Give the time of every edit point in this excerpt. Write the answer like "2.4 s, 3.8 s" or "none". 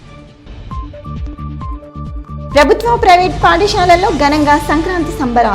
1.4 s